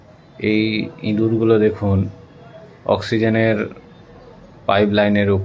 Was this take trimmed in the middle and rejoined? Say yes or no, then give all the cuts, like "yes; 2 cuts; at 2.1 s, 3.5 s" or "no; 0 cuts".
no; 0 cuts